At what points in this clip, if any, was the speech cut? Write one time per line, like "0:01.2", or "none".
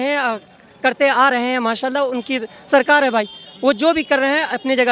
none

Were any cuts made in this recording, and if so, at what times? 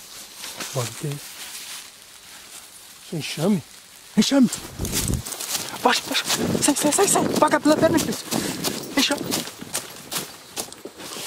none

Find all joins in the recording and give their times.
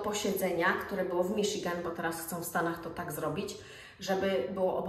none

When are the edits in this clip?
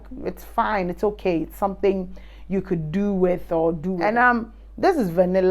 0:04.0

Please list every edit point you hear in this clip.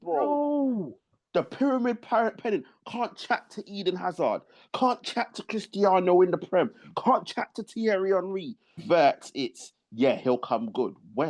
0:08.8

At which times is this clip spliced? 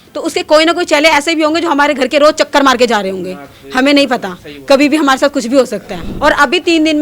0:06.0

